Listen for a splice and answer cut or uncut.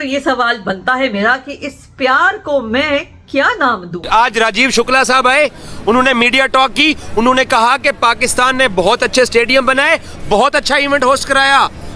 uncut